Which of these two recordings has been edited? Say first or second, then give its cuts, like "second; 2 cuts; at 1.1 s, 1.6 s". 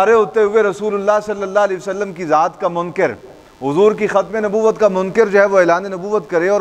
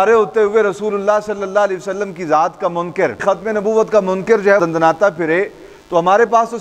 second; 2 cuts; at 3.2 s, 4.6 s